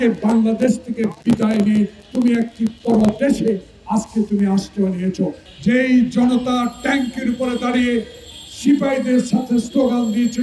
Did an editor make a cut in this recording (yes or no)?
yes